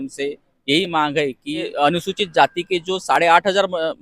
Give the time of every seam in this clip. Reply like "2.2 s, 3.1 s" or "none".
1.7 s